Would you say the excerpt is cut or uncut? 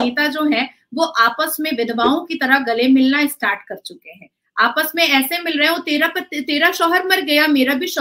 uncut